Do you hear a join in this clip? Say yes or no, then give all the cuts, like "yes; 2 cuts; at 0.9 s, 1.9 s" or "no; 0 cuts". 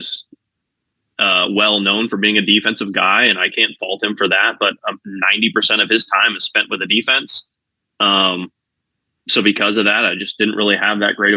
no; 0 cuts